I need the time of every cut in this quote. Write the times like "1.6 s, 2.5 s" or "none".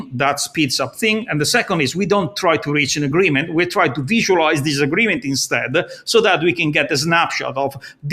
none

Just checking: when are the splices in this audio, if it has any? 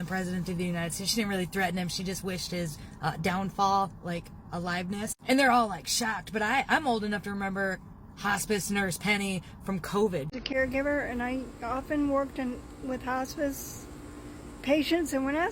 10.4 s

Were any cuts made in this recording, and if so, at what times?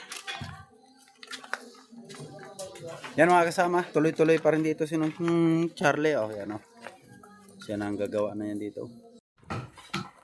9.3 s

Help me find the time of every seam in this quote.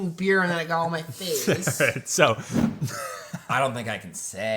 2.5 s

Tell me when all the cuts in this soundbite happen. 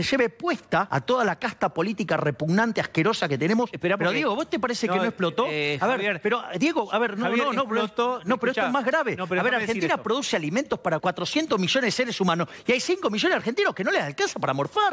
0.9 s, 3.7 s, 11.0 s

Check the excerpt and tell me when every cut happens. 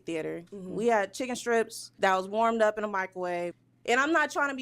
1.8 s, 3.7 s

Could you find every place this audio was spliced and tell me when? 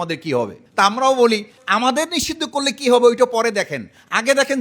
1.6 s

